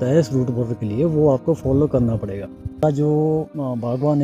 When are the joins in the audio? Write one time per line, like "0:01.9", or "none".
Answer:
0:02.8